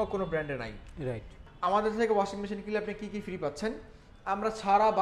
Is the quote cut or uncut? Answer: cut